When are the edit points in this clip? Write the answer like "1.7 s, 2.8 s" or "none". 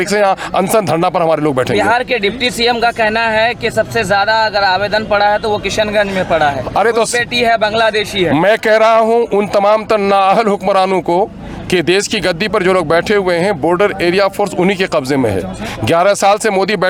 none

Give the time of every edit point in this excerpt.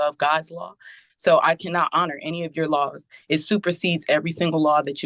none

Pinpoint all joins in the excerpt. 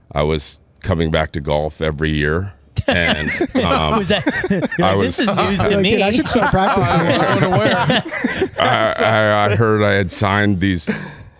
none

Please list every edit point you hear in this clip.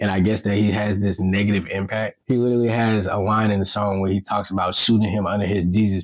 2.2 s

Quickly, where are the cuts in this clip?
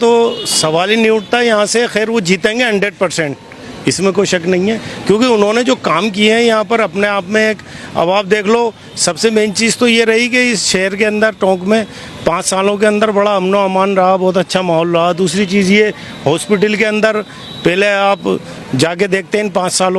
none

